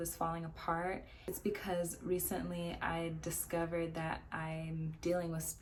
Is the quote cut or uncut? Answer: uncut